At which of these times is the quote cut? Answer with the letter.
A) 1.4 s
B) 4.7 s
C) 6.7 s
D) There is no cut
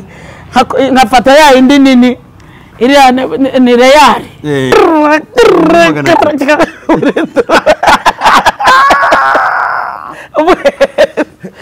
B